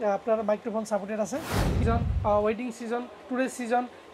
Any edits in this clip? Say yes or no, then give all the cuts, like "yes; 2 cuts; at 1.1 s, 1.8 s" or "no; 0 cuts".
yes; 1 cut; at 1.7 s